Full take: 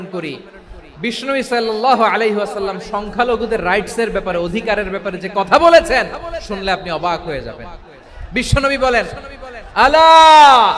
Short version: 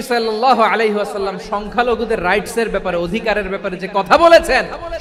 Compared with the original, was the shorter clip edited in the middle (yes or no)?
no